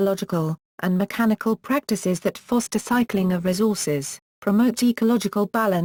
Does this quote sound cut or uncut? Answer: uncut